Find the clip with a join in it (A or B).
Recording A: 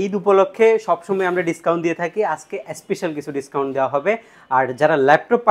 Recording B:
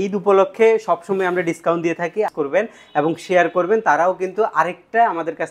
B